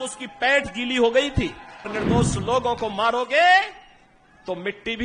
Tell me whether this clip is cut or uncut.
cut